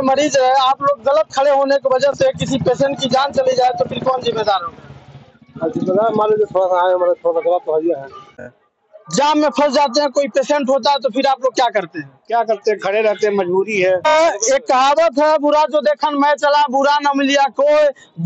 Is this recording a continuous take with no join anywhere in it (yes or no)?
no